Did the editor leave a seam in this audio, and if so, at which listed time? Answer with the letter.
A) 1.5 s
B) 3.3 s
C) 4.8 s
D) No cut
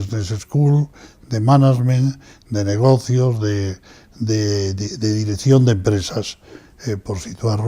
B